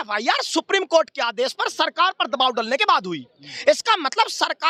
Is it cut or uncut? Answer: uncut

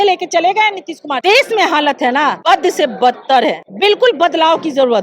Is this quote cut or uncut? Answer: cut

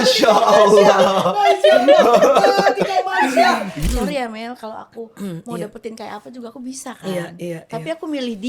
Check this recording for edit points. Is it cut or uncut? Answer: cut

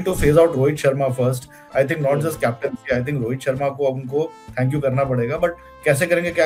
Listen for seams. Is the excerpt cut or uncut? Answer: uncut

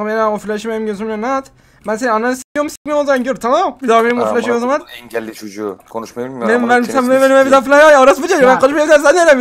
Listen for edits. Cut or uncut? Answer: cut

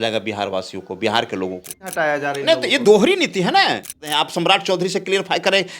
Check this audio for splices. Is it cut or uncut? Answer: cut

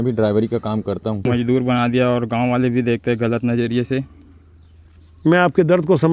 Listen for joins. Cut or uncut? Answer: cut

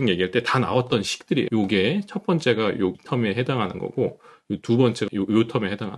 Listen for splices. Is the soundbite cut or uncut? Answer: cut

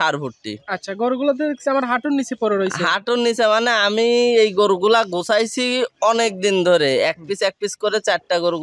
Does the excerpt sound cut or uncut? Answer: uncut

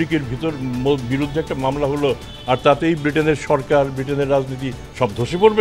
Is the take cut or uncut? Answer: uncut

